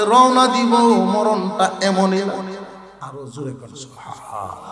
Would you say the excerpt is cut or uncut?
cut